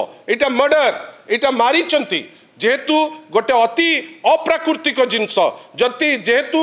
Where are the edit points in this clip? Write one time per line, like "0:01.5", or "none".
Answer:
none